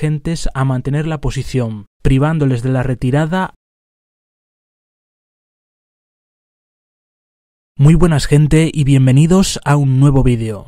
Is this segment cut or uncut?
uncut